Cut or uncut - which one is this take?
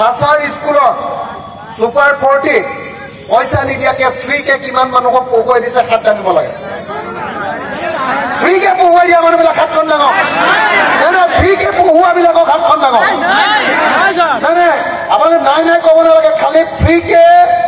uncut